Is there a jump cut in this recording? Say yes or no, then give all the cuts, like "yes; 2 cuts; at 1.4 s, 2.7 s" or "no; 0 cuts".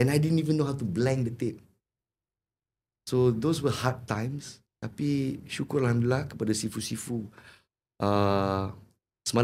no; 0 cuts